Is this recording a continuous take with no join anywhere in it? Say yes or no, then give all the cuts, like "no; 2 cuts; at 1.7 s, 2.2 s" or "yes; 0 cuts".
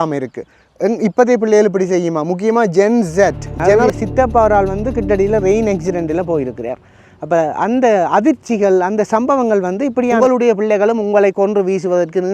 no; 2 cuts; at 3.7 s, 10.2 s